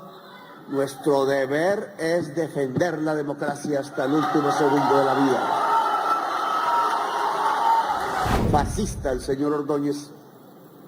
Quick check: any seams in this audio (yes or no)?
yes